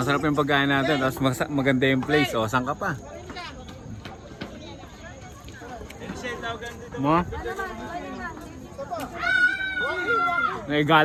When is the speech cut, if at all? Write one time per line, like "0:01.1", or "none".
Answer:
none